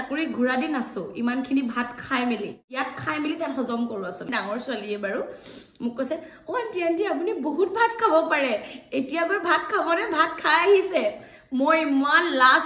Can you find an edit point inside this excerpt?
yes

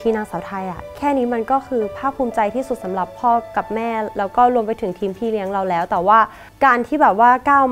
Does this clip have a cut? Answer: yes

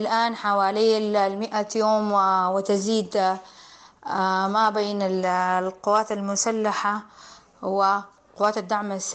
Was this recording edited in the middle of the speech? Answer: yes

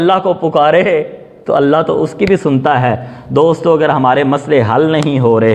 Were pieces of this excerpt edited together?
no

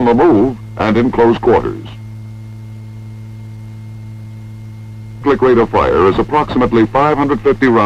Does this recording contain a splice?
no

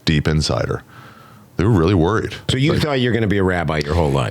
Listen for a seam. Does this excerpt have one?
yes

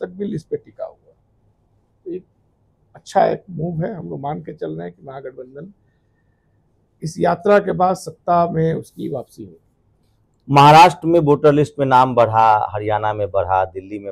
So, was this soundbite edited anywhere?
no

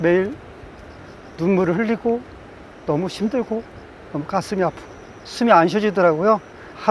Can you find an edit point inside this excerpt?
no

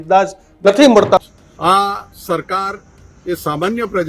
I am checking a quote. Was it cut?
yes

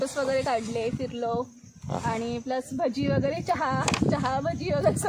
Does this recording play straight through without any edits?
yes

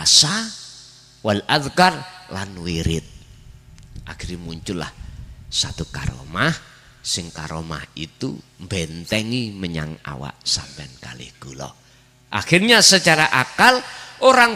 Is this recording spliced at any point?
no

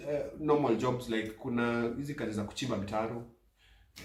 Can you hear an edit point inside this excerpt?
no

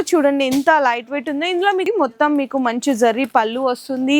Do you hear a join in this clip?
yes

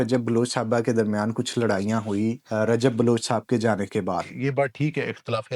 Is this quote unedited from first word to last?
no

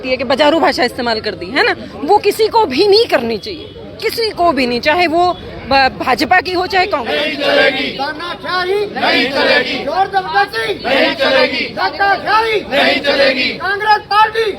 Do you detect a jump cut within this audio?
yes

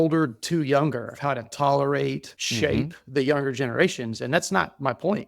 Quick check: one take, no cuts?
no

